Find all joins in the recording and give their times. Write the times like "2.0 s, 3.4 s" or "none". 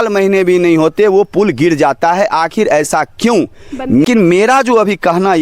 4.1 s